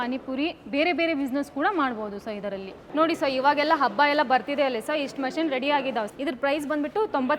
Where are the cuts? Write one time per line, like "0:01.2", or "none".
0:06.1